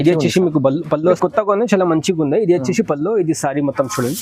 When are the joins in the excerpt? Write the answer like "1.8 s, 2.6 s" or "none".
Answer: 1.2 s